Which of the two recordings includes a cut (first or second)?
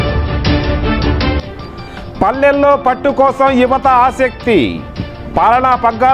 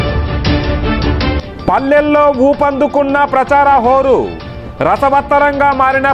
first